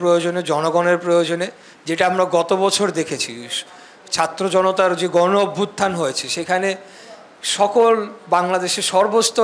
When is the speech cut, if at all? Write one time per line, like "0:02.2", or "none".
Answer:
none